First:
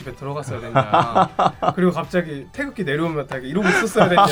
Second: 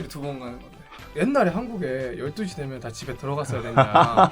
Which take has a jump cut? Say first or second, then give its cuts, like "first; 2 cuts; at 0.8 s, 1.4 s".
second; 1 cut; at 1.0 s